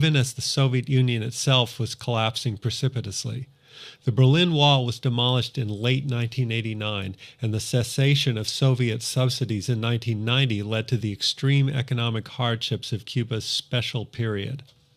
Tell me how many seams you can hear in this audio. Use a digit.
1